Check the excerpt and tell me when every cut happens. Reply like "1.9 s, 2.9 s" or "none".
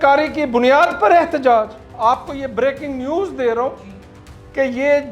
1.9 s